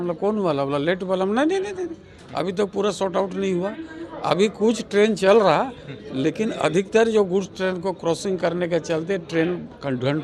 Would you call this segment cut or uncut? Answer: uncut